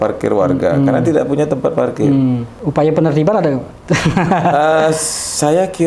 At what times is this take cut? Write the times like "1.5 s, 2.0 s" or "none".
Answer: 2.5 s